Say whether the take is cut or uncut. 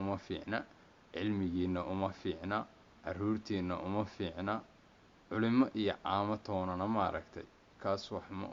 uncut